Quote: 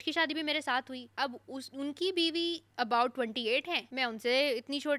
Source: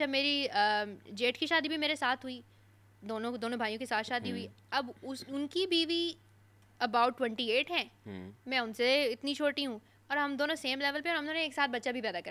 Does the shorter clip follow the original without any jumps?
no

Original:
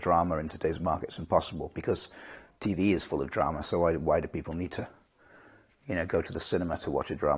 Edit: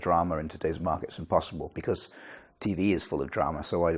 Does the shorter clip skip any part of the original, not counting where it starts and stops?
no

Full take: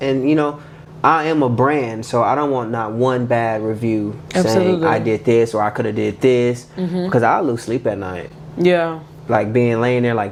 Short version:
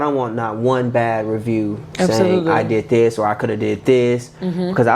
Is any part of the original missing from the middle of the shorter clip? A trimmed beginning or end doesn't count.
no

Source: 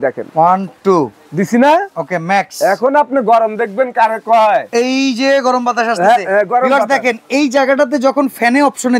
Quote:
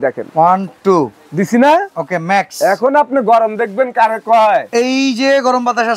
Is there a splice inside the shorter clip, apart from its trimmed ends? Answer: no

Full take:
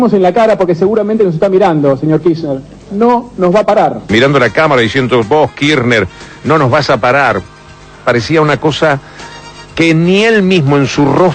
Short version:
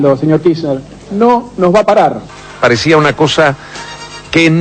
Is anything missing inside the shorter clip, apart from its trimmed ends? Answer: yes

